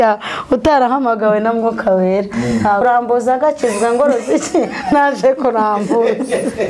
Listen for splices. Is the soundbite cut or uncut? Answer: cut